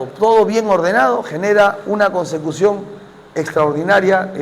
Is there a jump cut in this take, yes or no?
no